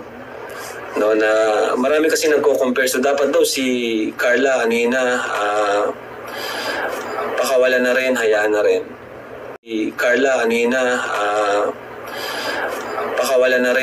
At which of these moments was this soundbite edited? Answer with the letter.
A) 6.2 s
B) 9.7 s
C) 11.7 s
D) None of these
B